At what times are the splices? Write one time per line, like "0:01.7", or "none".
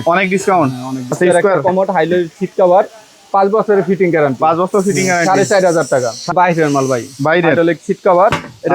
0:01.1
0:06.3

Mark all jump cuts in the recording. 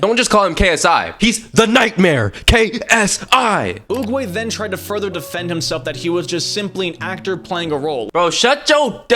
0:03.8
0:08.1

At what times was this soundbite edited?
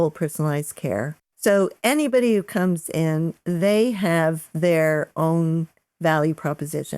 0:01.2
0:05.8

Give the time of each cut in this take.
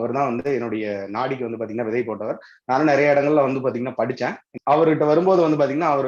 0:04.5

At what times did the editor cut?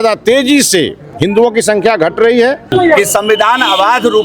0:02.7

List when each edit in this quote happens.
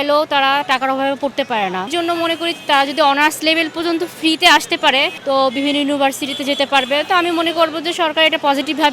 0:01.9
0:05.1

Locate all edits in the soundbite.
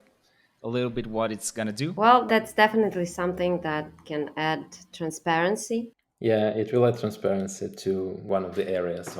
0:02.2
0:06.0
0:08.2

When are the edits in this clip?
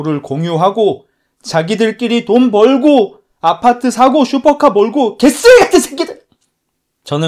none

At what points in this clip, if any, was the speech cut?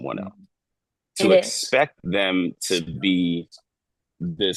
none

